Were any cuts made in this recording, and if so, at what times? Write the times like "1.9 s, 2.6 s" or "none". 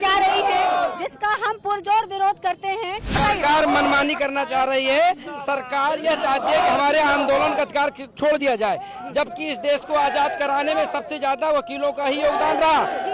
3.2 s